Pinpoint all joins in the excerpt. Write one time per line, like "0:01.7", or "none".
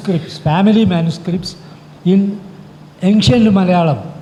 none